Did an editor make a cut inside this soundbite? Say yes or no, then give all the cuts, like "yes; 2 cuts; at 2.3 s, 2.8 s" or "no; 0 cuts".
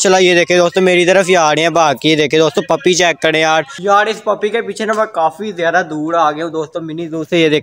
no; 0 cuts